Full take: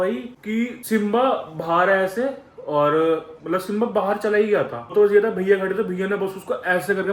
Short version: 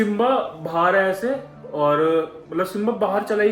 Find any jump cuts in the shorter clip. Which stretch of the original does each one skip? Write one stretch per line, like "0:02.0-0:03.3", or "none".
none